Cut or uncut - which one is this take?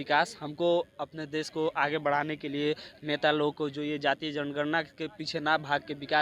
uncut